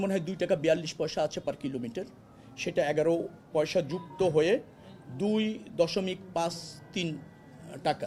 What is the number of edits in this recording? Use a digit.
0